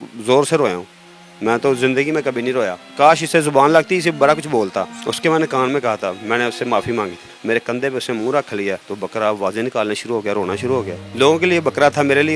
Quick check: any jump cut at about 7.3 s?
yes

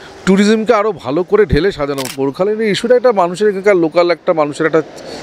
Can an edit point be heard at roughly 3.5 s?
no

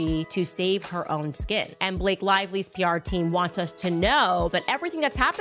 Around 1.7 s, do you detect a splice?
yes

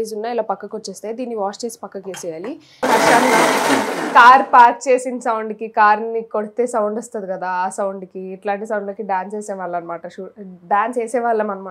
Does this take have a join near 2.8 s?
yes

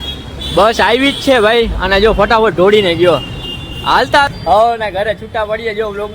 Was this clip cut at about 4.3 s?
yes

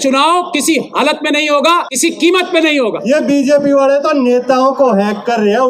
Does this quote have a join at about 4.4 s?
no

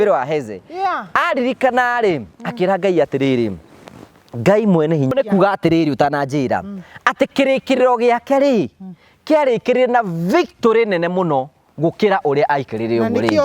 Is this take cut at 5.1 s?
yes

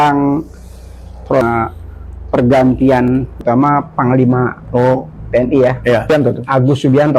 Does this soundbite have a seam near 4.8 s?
no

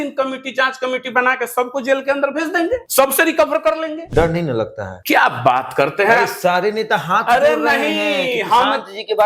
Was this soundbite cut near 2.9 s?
yes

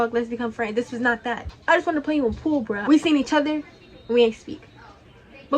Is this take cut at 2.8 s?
yes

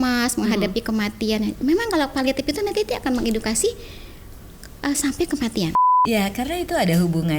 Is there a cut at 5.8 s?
yes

